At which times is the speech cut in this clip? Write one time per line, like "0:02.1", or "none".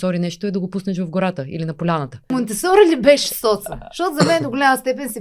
0:02.3